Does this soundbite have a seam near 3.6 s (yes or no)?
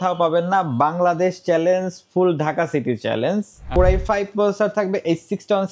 yes